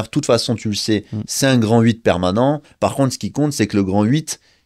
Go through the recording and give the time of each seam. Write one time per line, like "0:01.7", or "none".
0:02.7